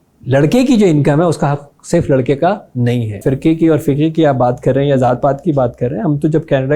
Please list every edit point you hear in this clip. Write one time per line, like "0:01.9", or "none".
0:03.2